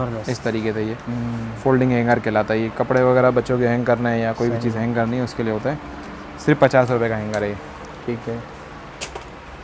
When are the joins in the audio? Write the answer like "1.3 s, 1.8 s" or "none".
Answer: none